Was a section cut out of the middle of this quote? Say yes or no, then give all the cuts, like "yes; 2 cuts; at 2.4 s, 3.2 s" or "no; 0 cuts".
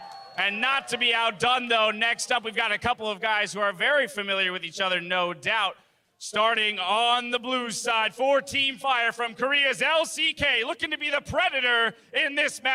no; 0 cuts